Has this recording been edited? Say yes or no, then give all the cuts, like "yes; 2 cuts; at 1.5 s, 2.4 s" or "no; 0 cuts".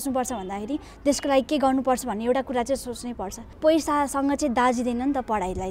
yes; 1 cut; at 3.6 s